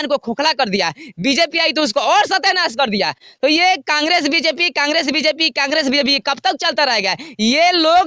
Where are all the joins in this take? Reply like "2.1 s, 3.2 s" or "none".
none